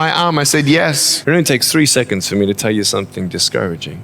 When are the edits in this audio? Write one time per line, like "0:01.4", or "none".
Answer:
0:01.1